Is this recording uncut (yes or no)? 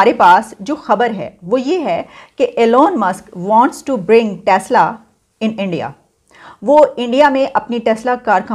yes